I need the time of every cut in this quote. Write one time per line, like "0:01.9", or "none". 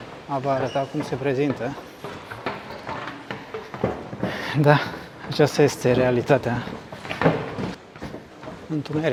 none